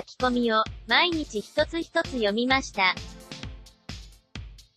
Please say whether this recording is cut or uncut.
cut